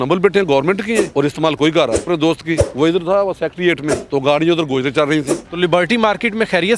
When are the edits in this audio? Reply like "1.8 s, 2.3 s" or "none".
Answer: 1.1 s, 2.4 s, 4.0 s, 5.4 s